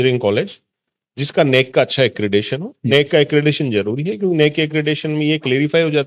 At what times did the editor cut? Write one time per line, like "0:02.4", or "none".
none